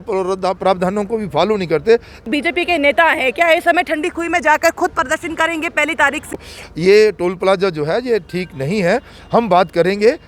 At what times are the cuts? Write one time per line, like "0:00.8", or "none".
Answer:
0:02.2
0:06.6